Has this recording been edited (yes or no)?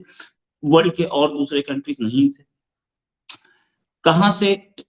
no